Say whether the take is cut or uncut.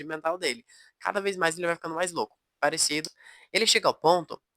cut